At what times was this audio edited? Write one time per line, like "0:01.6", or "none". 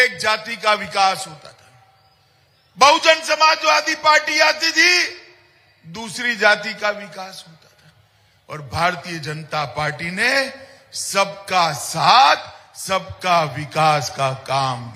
none